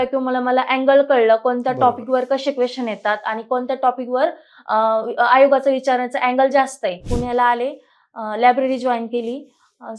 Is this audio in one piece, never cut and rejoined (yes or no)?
no